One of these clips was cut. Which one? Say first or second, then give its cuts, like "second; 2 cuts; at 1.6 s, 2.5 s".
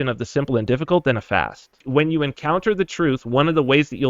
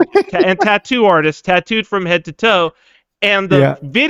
first; 1 cut; at 1.8 s